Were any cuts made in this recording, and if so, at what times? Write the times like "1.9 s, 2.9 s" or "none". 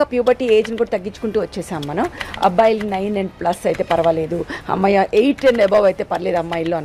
none